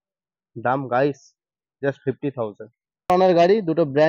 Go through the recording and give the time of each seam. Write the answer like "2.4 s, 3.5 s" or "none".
3.1 s